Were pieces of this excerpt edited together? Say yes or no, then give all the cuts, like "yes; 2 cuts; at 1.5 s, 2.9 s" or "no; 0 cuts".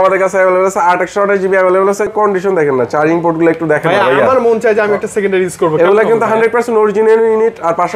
yes; 1 cut; at 2.1 s